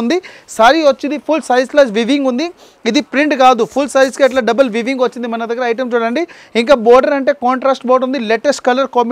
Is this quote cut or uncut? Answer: uncut